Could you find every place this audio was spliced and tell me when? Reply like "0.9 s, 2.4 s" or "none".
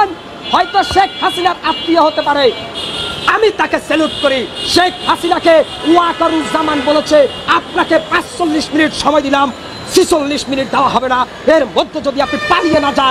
none

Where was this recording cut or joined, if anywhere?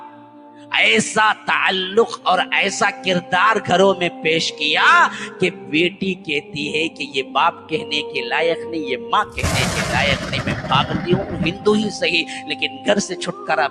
none

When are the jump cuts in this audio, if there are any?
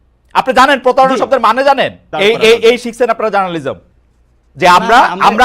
2.1 s

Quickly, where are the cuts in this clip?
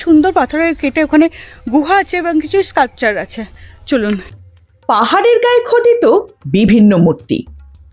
4.3 s

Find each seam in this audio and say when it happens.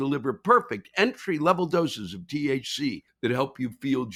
none

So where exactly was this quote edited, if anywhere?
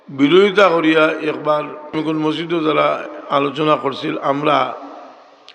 1.9 s

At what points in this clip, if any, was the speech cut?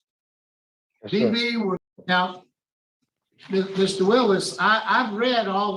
1.9 s

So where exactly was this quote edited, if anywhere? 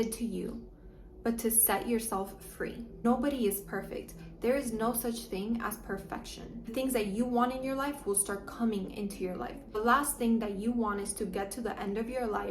2.9 s, 6.6 s, 9.5 s

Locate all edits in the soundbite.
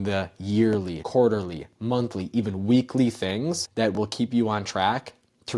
3.6 s

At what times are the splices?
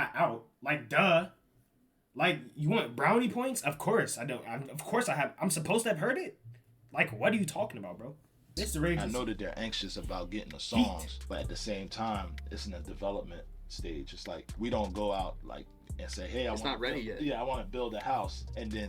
8.5 s

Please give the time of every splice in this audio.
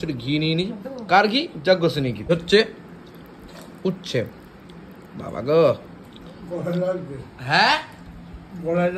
2.2 s

